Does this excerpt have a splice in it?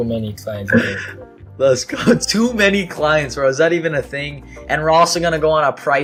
no; 0 cuts

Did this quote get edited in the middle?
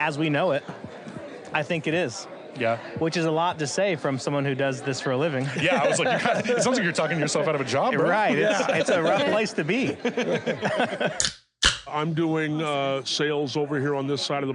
yes; 1 cut; at 11.8 s

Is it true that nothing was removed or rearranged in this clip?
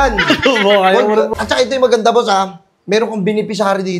no; 1 cut; at 1.3 s

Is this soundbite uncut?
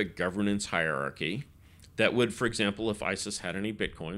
yes; 0 cuts

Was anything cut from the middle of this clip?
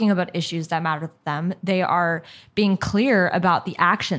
no; 0 cuts

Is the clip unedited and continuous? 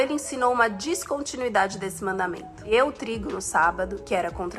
no; 1 cut; at 2.6 s

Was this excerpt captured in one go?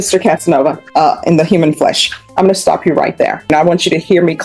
no; 2 cuts; at 0.8 s, 3.5 s

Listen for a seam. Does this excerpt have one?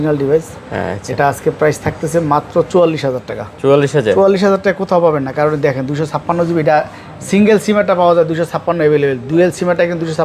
no; 0 cuts

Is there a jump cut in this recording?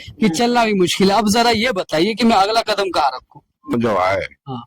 yes; 1 cut; at 3.7 s

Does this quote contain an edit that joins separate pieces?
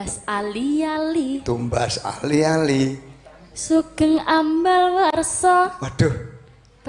no; 0 cuts

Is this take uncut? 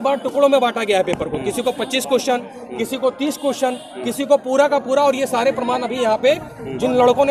yes; 0 cuts

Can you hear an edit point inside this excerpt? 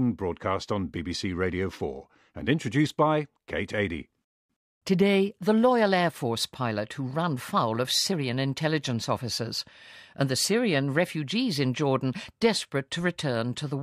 no; 0 cuts

